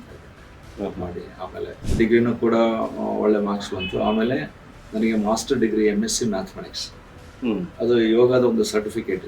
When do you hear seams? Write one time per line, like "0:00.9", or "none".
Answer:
0:01.8